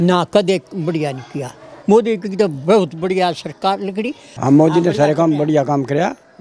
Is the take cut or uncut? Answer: cut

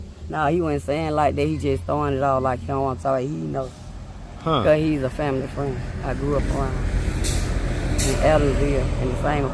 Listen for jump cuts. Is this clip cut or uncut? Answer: uncut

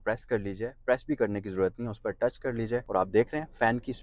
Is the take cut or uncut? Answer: cut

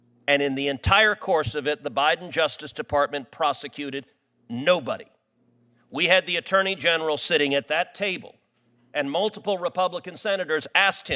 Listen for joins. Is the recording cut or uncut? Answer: uncut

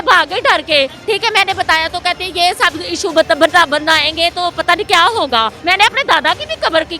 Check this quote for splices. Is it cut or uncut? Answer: cut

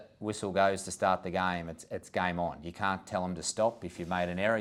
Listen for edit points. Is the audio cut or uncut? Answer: uncut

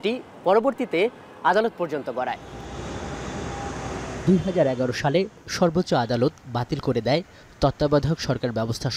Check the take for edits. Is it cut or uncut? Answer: uncut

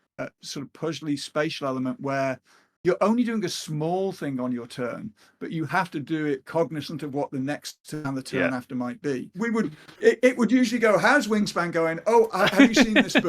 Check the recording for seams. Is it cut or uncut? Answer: cut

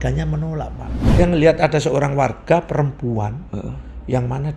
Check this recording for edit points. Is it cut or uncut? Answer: cut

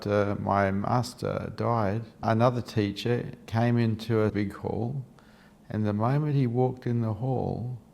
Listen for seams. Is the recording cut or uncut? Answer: cut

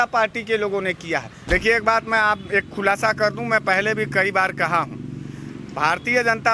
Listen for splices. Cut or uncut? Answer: cut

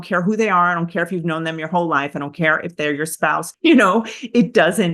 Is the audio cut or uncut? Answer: cut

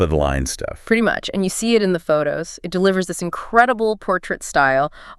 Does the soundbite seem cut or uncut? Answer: uncut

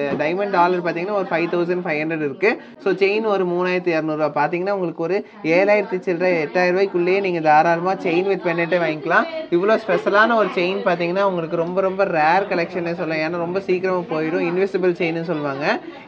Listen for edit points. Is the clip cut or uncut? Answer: uncut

